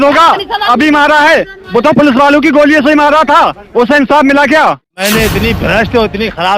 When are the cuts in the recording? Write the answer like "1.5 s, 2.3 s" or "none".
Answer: 4.9 s